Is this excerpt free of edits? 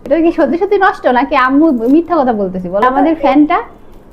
no; 1 cut; at 2.8 s

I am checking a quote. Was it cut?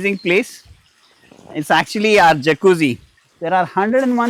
yes; 1 cut; at 3.4 s

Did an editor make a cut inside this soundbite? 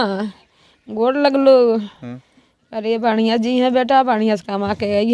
no; 0 cuts

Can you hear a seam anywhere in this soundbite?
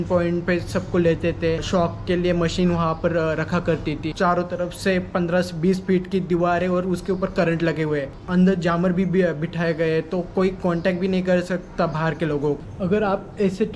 yes; 4 cuts; at 1.6 s, 4.1 s, 8.2 s, 12.7 s

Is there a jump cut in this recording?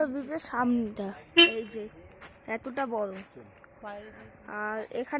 no; 0 cuts

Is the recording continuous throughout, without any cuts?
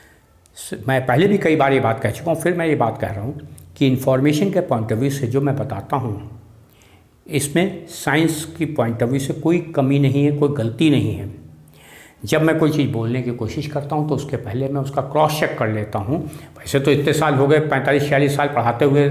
yes; 0 cuts

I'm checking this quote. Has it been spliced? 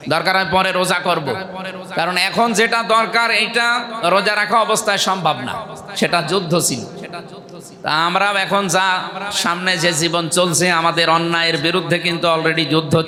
no; 0 cuts

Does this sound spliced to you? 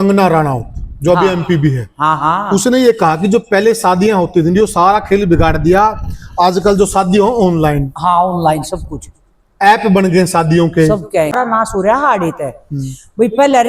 yes; 1 cut; at 11.3 s

